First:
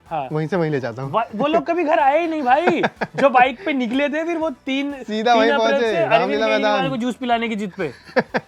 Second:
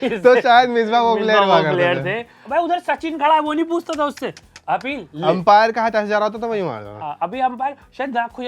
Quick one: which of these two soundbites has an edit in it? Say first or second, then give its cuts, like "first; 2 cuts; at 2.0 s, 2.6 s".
second; 1 cut; at 2.4 s